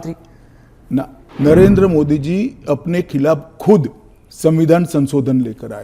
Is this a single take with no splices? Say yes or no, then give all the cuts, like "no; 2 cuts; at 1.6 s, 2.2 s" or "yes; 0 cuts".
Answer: no; 1 cut; at 1.2 s